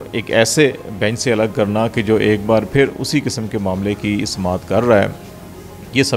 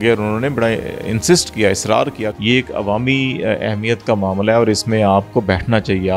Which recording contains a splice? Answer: second; 1 cut; at 2.4 s

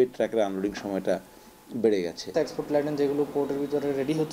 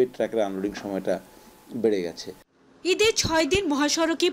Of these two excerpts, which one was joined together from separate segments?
first; 1 cut; at 2.3 s

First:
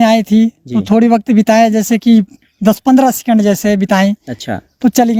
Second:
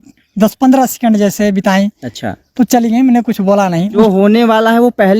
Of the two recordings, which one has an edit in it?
second; 1 cut; at 3.9 s

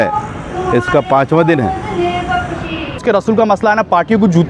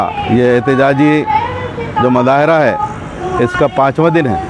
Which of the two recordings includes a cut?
first; 1 cut; at 3.0 s

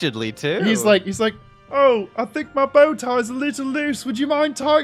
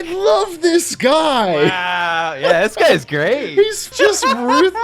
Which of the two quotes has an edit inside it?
second; 1 cut; at 3.8 s

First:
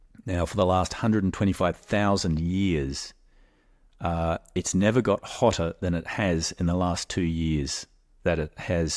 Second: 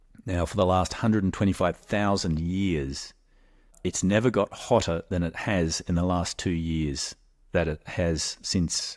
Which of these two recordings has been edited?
second; 1 cut; at 3.7 s

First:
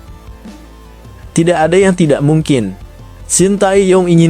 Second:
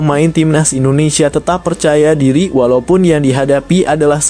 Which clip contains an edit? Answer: first; 1 cut; at 1.2 s

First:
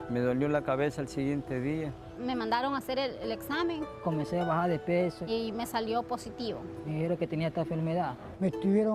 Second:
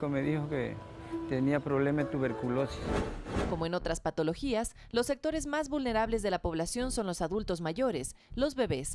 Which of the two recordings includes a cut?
second; 1 cut; at 2.8 s

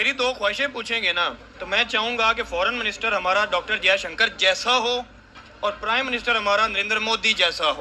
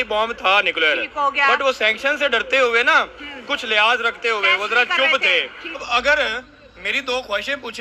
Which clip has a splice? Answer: second; 1 cut; at 5.8 s

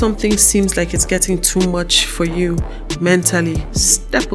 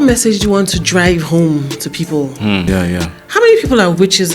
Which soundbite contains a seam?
second; 1 cut; at 2.7 s

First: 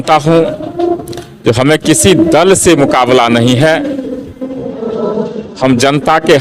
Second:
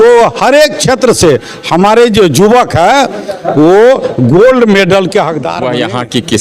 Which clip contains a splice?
second; 1 cut; at 5.5 s

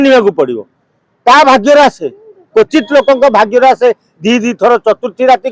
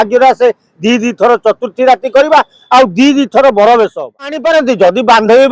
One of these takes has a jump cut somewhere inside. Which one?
second; 1 cut; at 4.4 s

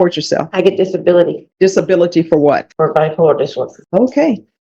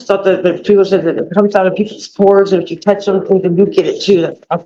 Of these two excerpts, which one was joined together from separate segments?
first; 3 cuts; at 1.4 s, 2.7 s, 3.8 s

